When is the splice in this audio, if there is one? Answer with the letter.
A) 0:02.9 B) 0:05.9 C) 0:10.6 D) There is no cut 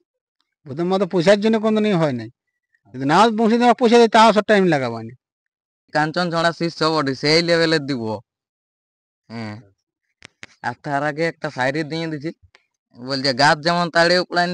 B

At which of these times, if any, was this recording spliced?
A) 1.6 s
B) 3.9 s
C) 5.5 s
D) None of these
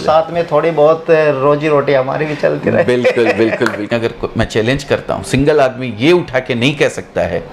B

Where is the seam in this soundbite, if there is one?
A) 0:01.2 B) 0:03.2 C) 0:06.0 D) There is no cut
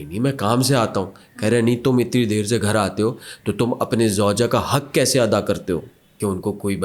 C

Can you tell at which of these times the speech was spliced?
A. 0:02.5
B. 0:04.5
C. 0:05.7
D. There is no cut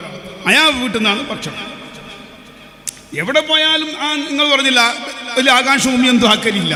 D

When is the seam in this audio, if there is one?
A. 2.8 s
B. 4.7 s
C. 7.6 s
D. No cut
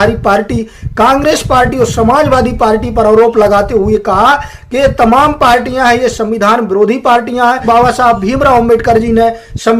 C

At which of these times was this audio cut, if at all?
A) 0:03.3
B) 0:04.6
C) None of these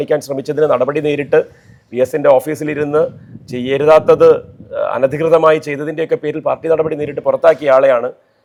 C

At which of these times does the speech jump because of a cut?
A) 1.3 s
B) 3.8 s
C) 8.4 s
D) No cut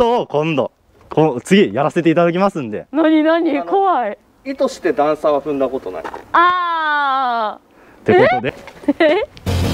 C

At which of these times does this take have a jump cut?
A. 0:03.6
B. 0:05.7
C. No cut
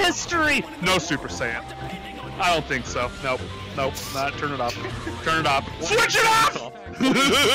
B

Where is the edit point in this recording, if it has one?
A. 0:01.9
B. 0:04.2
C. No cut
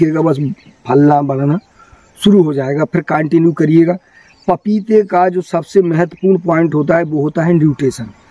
C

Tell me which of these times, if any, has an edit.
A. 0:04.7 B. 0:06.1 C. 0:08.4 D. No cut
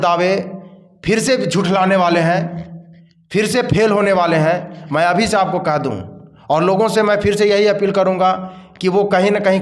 D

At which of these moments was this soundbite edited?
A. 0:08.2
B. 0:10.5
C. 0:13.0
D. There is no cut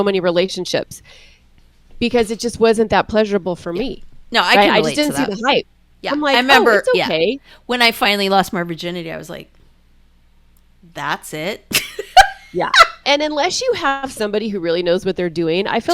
C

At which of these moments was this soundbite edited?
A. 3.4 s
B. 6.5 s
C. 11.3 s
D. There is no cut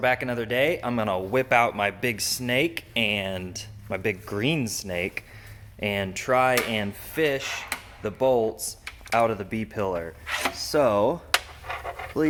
D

